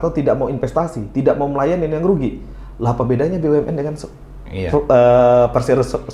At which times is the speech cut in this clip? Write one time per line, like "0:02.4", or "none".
none